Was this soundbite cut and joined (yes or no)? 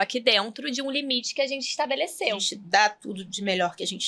yes